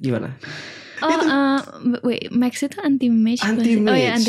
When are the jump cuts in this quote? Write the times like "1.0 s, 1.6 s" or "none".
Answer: 0.9 s